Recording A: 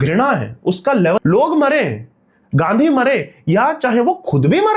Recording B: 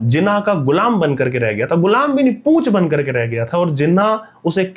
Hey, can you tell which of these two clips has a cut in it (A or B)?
A